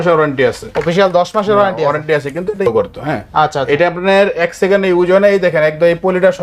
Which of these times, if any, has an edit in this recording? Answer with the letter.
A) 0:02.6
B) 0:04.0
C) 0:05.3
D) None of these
A